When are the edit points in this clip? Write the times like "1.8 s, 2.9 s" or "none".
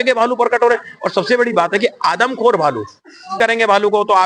3.4 s